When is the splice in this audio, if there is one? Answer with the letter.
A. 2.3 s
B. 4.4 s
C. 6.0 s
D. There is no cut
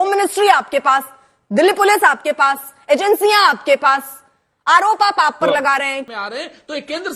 C